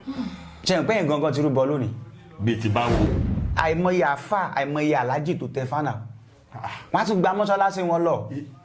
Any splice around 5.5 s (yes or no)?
no